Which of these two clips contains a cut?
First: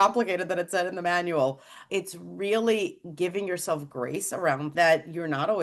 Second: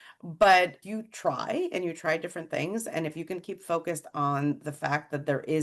first; 2 cuts; at 1.9 s, 4.7 s

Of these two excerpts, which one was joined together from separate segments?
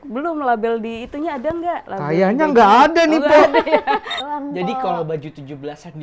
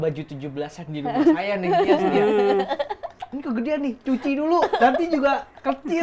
first; 2 cuts; at 1.9 s, 4.1 s

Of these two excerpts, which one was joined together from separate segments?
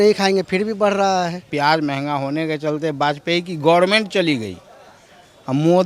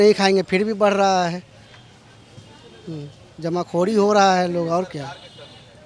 first; 1 cut; at 1.4 s

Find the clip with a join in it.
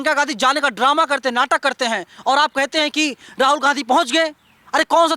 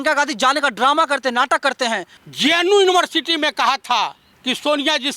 second; 2 cuts; at 2.1 s, 4.3 s

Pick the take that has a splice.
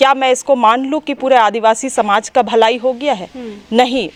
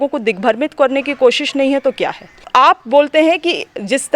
second; 1 cut; at 2.4 s

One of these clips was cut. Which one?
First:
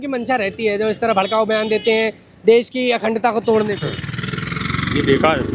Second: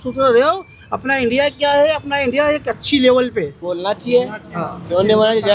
second; 1 cut; at 3.6 s

